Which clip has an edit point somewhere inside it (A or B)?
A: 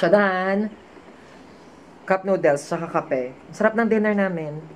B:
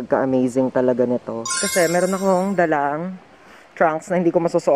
B